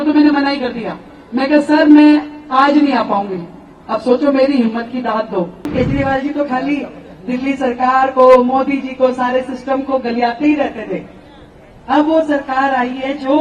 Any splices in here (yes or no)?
yes